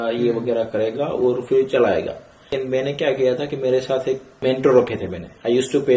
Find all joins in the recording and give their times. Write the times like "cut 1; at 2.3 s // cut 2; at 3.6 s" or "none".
cut 1; at 2.5 s // cut 2; at 4.3 s